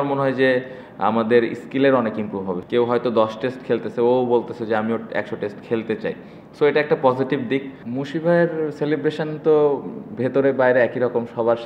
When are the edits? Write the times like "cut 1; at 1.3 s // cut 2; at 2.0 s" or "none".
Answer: cut 1; at 2.6 s // cut 2; at 7.8 s